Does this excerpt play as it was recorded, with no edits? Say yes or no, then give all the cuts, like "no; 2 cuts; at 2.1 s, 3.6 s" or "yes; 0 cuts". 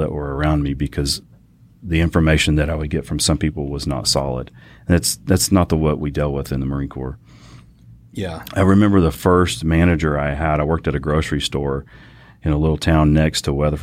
yes; 0 cuts